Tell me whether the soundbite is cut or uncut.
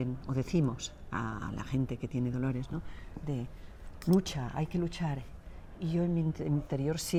uncut